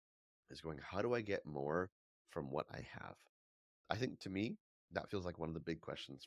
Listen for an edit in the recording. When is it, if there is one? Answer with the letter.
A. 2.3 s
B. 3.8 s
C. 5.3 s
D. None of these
B